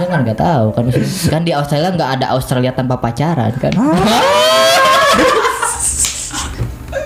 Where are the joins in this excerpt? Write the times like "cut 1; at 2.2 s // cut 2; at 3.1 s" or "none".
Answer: none